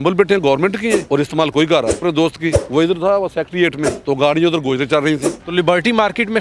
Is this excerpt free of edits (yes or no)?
no